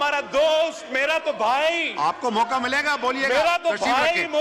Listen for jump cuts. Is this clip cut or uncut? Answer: uncut